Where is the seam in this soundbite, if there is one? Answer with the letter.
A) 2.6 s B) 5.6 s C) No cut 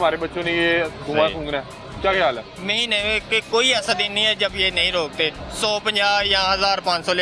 A